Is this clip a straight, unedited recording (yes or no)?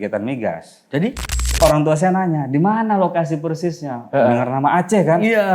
no